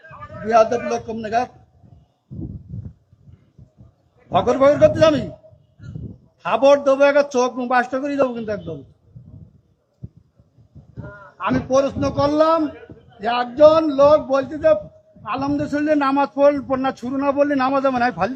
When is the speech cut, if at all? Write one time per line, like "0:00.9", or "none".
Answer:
none